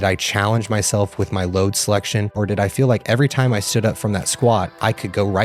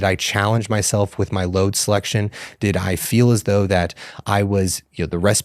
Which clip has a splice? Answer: first; 1 cut; at 2.4 s

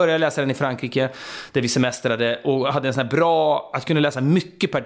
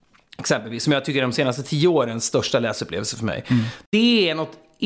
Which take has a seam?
second; 1 cut; at 3.7 s

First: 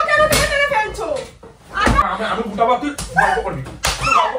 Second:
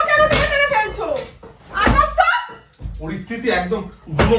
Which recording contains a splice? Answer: first; 1 cut; at 2.0 s

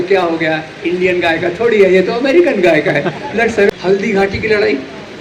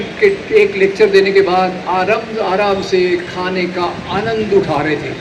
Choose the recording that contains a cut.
first; 1 cut; at 3.7 s

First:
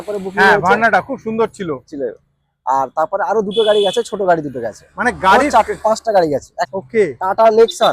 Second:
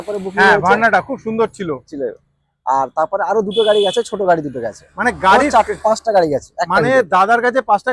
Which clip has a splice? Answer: first; 1 cut; at 6.6 s

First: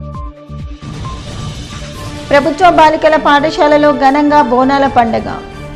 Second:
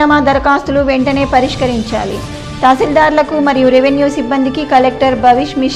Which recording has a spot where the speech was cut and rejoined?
first; 1 cut; at 1.0 s

